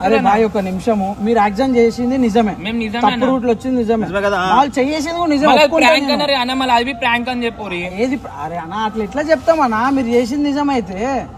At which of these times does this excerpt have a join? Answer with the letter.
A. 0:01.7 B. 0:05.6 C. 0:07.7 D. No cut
D